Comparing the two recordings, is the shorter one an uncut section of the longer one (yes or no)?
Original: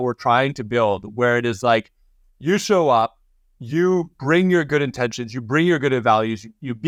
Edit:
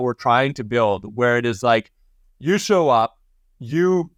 yes